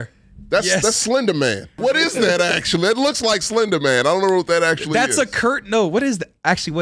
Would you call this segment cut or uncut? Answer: cut